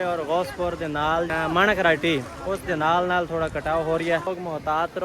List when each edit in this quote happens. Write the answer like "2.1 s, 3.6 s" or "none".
1.3 s, 4.3 s